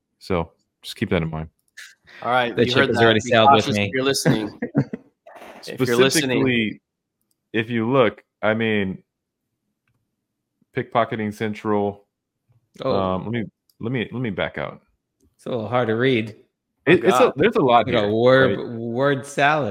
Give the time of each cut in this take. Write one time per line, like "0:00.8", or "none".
none